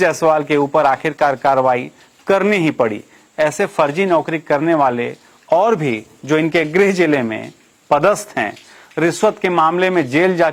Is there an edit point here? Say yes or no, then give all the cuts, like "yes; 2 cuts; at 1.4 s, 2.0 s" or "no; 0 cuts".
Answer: no; 0 cuts